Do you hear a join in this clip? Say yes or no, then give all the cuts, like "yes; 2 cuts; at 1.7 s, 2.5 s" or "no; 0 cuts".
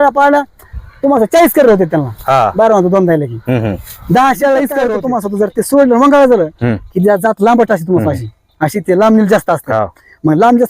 yes; 1 cut; at 5.0 s